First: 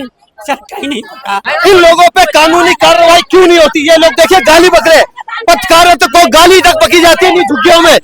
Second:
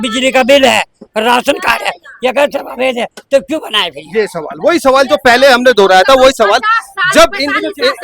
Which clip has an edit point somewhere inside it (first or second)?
first